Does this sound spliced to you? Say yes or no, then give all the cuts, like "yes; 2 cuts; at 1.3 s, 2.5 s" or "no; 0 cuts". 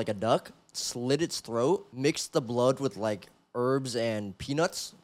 yes; 1 cut; at 1.9 s